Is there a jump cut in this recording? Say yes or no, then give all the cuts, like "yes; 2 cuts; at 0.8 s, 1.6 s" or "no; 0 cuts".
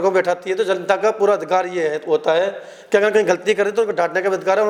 no; 0 cuts